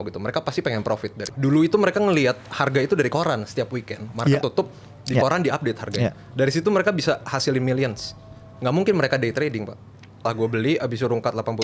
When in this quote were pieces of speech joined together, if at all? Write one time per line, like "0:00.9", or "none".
0:01.2
0:10.3

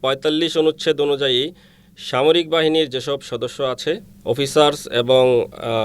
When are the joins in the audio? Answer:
0:04.1

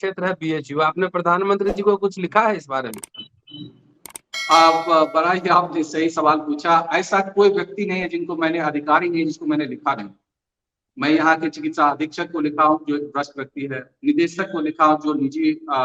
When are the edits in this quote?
none

